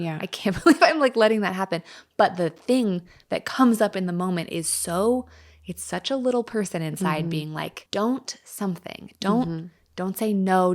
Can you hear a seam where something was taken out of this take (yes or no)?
yes